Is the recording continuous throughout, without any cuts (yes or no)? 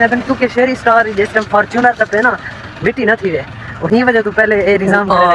yes